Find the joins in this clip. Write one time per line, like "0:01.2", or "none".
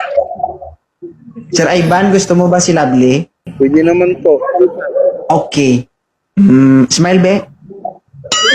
0:03.4